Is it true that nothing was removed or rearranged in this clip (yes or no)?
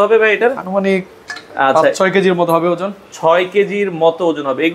yes